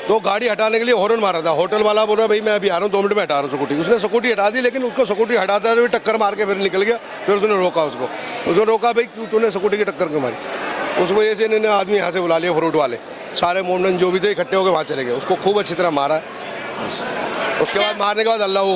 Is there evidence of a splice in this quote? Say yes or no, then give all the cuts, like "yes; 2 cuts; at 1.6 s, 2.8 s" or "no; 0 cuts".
no; 0 cuts